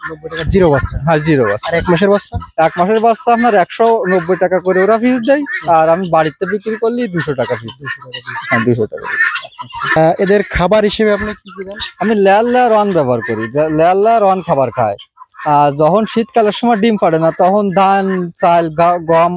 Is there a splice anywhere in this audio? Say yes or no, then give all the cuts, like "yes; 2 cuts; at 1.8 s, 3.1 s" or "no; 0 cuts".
no; 0 cuts